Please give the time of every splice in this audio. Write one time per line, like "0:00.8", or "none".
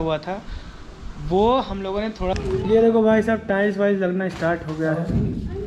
0:02.4